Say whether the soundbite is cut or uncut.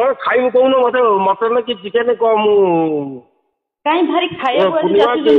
uncut